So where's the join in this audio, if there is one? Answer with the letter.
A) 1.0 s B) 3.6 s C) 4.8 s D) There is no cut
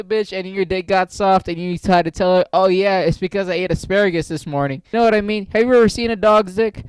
C